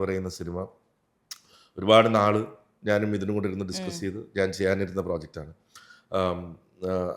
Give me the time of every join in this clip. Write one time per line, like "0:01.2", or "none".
none